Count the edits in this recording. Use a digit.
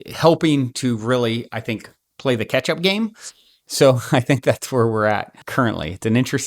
1